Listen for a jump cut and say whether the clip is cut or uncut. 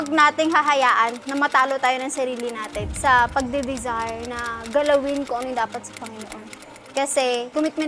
uncut